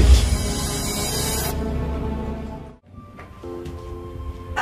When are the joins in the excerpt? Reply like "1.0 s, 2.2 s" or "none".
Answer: 2.6 s